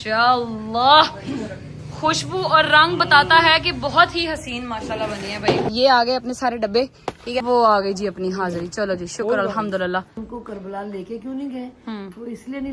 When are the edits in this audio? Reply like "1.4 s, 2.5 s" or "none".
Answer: 5.7 s, 7.4 s, 10.2 s